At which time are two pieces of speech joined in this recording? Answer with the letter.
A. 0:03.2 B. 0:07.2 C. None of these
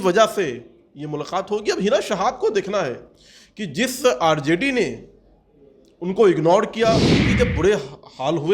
B